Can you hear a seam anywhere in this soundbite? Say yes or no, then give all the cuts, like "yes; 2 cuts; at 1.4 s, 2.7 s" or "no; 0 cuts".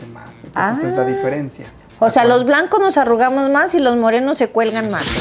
no; 0 cuts